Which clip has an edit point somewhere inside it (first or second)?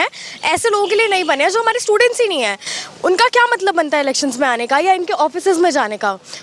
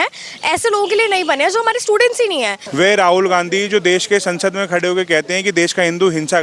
second